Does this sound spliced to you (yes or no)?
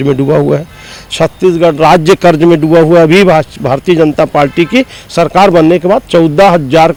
no